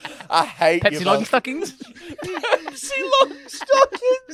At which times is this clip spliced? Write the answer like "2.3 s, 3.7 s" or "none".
none

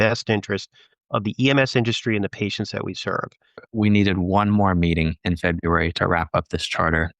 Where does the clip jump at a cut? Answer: 3.6 s

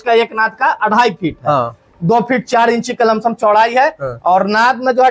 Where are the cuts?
1.8 s

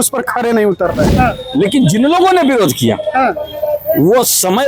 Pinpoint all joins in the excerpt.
1.1 s

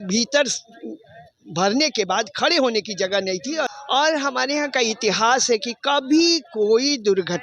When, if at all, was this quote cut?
3.7 s

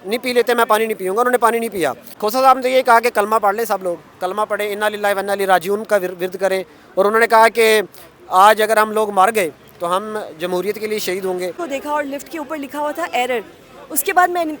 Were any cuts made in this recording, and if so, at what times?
2.1 s, 11.6 s

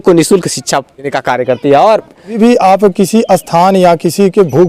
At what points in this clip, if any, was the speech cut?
1.2 s, 2.4 s

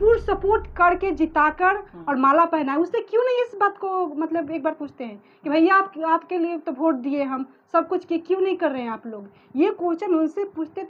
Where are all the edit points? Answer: none

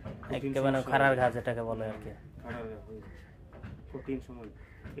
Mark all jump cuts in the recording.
none

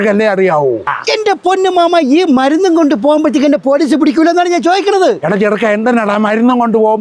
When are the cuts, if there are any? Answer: 1.0 s

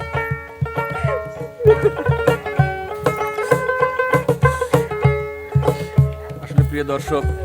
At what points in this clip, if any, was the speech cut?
none

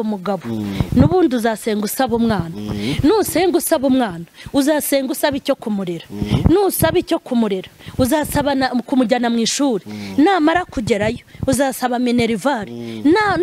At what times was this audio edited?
none

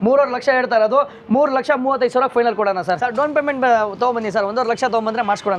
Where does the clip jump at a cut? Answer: 2.9 s

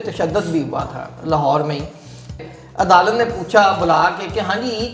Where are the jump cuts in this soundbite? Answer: 2.3 s

